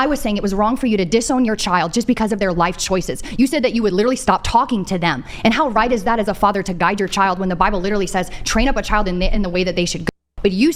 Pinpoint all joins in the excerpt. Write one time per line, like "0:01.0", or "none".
none